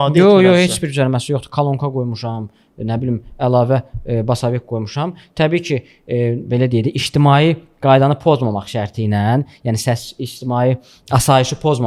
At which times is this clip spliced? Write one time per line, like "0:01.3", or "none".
none